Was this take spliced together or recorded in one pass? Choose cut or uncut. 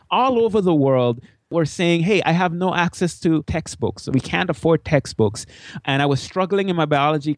cut